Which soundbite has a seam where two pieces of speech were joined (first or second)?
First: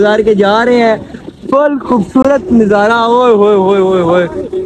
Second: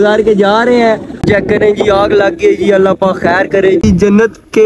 second